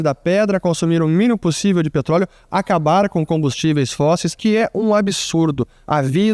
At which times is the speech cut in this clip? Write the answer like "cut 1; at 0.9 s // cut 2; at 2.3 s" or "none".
cut 1; at 4.4 s